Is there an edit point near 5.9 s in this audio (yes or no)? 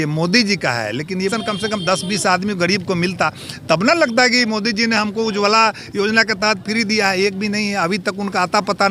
no